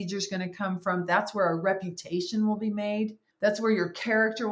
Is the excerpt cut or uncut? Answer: cut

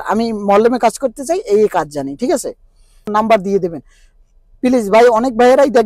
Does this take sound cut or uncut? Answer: cut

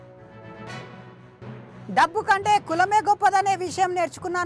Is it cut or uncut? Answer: cut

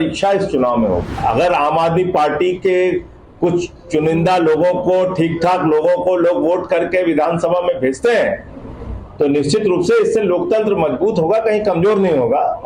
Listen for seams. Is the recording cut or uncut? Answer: cut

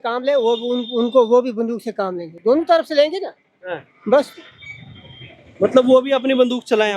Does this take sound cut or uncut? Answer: uncut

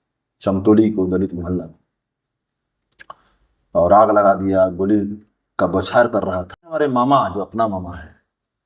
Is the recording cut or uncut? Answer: cut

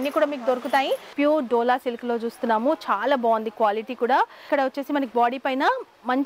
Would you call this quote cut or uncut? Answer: cut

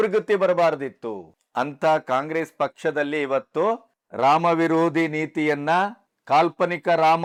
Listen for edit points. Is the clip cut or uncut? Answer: uncut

